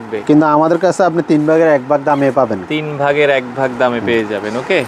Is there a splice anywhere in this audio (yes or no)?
no